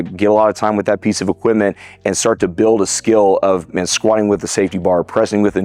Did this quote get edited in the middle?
no; 0 cuts

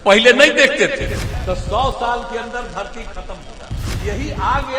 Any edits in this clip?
yes; 2 cuts; at 1.3 s, 3.9 s

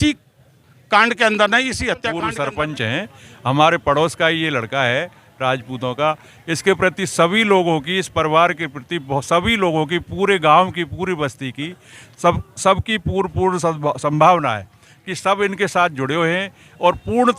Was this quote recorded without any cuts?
no; 1 cut; at 2.1 s

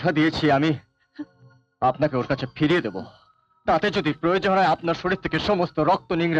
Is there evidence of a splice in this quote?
no; 0 cuts

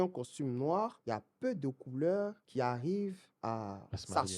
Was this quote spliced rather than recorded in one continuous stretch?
yes; 3 cuts; at 1.0 s, 2.4 s, 3.3 s

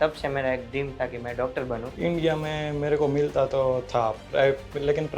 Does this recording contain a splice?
yes; 1 cut; at 1.9 s

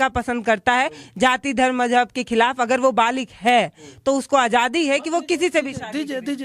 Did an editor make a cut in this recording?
no; 0 cuts

